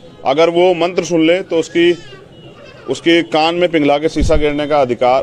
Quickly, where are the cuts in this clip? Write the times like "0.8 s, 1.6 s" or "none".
2.9 s